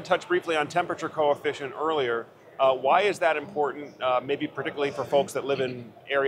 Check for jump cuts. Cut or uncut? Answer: uncut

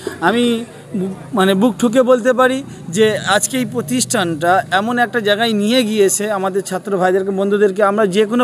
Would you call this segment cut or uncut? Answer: uncut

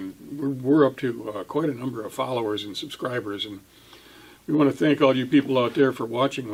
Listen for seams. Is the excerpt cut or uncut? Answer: uncut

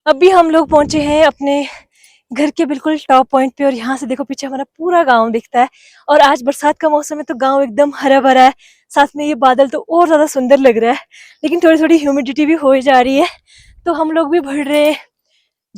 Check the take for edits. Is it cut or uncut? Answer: uncut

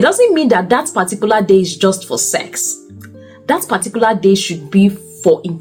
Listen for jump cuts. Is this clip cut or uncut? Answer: uncut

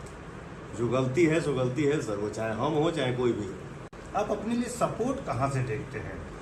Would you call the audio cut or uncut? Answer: uncut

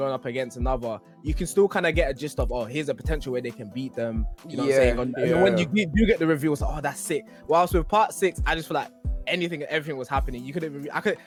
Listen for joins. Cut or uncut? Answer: uncut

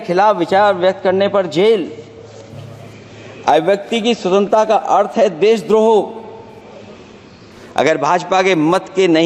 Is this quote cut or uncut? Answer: uncut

